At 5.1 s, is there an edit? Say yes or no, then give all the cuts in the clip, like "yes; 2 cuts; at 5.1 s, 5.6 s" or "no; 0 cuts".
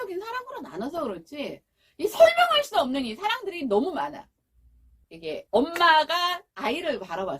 yes; 2 cuts; at 5.1 s, 6.5 s